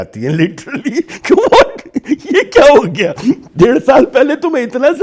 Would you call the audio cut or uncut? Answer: uncut